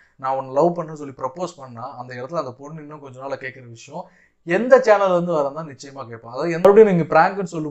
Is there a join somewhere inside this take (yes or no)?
yes